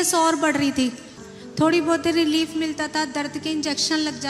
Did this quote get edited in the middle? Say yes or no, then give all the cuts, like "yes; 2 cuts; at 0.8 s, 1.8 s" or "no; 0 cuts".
yes; 1 cut; at 1.1 s